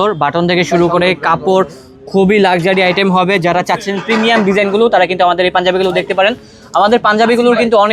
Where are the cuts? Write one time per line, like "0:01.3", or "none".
none